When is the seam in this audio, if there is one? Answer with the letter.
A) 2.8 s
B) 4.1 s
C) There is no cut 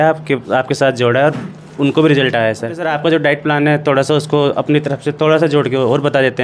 A